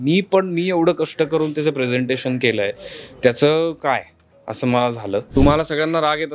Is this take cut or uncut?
cut